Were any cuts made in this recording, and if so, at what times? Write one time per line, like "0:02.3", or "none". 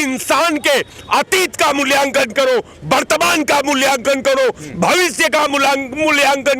none